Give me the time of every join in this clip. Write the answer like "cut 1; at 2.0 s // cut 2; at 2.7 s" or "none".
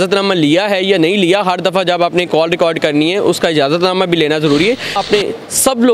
cut 1; at 5.0 s